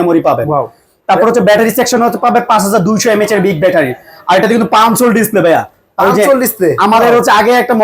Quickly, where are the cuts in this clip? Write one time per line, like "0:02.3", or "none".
none